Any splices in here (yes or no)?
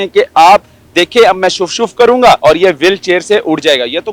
yes